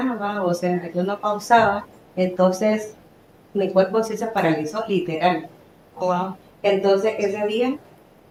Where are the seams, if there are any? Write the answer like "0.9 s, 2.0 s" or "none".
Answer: none